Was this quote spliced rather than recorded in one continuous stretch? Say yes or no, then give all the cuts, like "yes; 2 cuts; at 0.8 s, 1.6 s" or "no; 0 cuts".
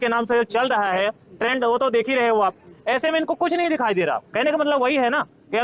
no; 0 cuts